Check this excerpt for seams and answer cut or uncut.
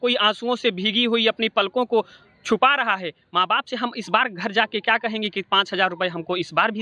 uncut